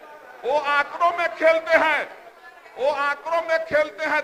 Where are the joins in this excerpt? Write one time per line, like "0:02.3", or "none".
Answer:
none

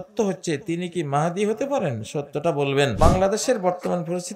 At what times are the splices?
0:03.0

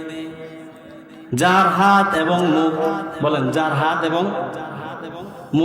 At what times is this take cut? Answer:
0:03.1

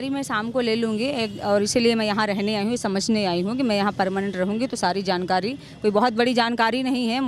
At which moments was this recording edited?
none

